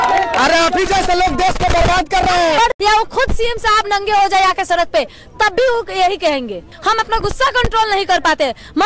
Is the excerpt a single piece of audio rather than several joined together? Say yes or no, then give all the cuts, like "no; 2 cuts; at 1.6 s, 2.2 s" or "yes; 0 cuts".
no; 2 cuts; at 2.7 s, 6.7 s